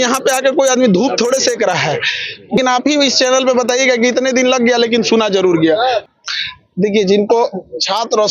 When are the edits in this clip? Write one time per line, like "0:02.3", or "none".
0:02.6
0:06.1